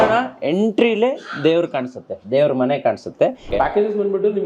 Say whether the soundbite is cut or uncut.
cut